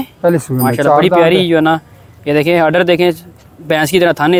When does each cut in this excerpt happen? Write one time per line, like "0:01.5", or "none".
none